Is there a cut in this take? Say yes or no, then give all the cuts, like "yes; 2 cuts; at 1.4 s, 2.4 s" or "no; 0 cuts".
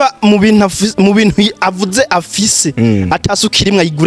no; 0 cuts